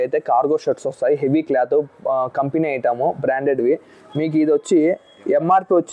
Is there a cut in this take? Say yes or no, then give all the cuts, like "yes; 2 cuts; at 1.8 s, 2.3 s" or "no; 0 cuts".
no; 0 cuts